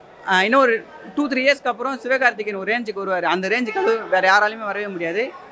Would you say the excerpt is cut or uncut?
uncut